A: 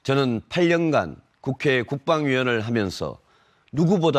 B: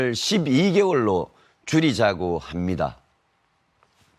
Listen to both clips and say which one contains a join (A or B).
A